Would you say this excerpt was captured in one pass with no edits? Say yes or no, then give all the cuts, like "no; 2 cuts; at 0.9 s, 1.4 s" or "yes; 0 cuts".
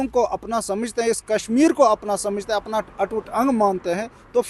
yes; 0 cuts